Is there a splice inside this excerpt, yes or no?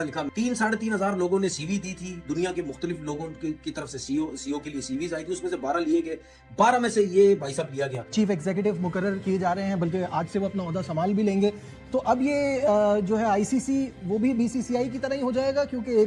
yes